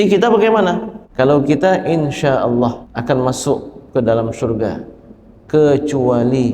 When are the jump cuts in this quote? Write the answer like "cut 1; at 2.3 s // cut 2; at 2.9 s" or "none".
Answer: cut 1; at 1.0 s // cut 2; at 2.8 s